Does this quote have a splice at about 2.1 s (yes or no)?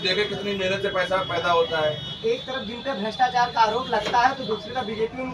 yes